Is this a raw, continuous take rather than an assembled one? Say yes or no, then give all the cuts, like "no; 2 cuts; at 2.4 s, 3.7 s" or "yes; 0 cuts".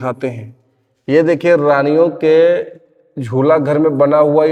yes; 0 cuts